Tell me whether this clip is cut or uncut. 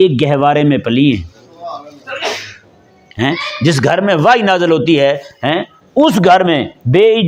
uncut